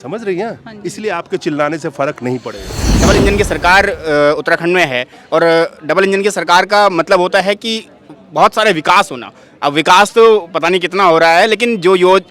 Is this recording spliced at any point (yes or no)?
yes